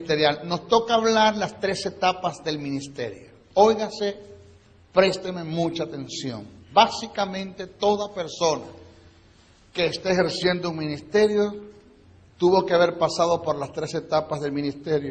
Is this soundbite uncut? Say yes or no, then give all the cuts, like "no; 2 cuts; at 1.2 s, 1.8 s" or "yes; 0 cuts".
no; 1 cut; at 10.0 s